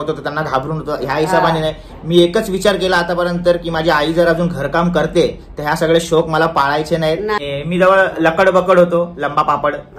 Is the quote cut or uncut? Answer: cut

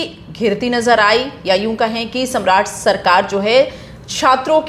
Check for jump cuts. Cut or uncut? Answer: uncut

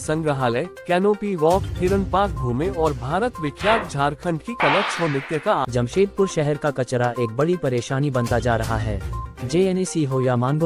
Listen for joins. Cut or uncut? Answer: cut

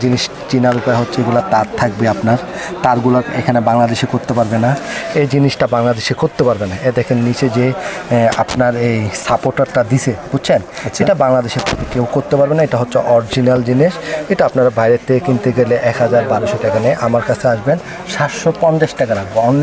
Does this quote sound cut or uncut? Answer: uncut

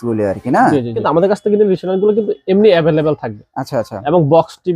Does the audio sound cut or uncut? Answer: cut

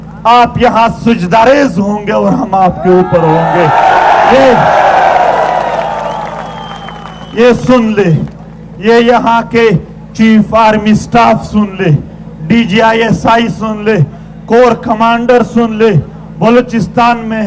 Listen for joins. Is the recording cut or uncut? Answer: uncut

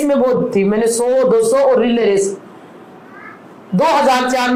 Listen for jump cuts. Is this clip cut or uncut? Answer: uncut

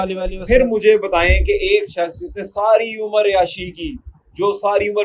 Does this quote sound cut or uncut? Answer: uncut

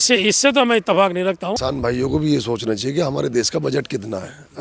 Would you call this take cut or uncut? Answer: cut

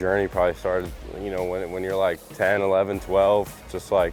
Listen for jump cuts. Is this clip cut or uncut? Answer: cut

